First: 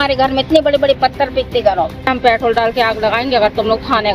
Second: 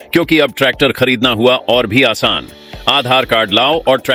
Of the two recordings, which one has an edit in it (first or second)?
first